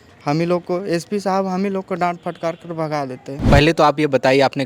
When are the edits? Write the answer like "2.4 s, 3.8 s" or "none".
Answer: 3.5 s